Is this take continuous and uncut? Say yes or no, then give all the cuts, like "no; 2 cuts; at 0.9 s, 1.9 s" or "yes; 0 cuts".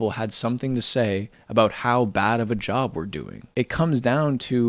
no; 1 cut; at 3.5 s